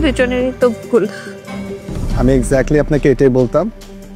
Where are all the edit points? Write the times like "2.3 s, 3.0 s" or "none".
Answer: 1.8 s

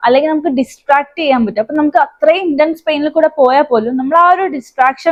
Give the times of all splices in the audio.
none

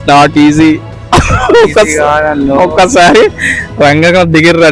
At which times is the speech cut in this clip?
none

